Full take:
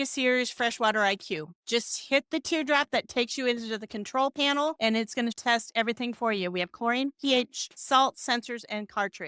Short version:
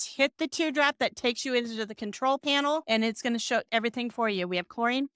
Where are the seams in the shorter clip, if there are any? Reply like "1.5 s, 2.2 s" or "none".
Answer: 3.5 s